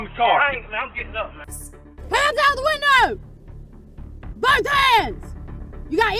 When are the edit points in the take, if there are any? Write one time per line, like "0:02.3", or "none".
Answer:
0:01.5